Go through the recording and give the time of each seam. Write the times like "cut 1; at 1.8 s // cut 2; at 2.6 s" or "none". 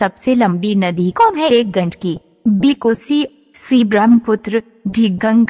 cut 1; at 1.1 s